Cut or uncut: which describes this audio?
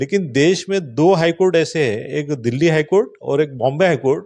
uncut